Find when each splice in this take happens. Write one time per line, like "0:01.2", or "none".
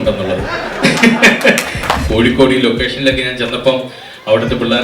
0:02.0